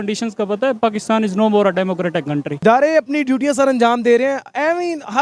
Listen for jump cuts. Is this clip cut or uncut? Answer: cut